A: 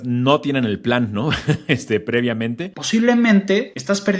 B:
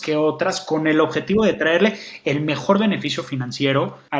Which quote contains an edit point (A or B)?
A